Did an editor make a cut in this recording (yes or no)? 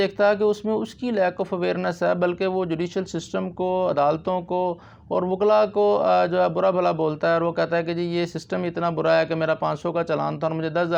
no